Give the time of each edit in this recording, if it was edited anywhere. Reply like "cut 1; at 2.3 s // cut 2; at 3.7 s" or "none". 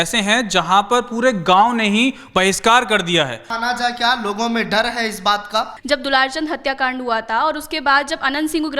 cut 1; at 3.5 s // cut 2; at 5.8 s